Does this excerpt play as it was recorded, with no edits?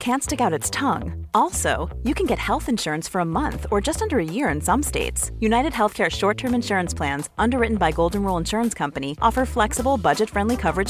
yes; 0 cuts

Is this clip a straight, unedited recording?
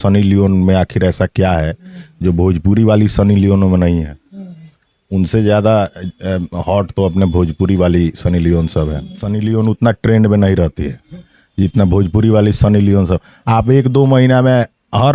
no; 1 cut; at 9.2 s

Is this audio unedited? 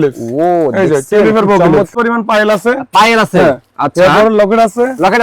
no; 1 cut; at 1.9 s

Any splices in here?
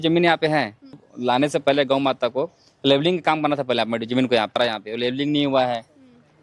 yes; 2 cuts; at 1.0 s, 4.6 s

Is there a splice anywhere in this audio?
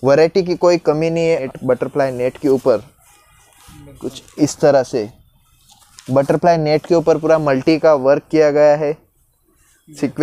yes; 1 cut; at 1.4 s

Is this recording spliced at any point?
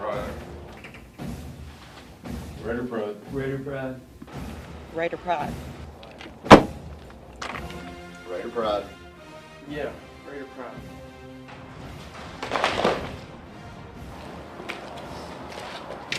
no; 0 cuts

